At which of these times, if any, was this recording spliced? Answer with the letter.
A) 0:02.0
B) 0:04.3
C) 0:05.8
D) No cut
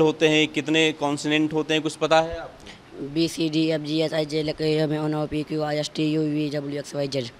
D